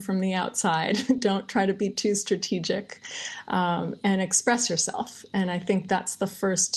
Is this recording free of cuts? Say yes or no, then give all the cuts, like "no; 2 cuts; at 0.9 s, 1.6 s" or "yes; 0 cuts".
yes; 0 cuts